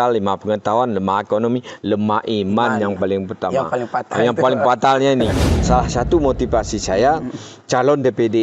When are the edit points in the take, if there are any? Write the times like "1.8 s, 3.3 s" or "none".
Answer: 5.4 s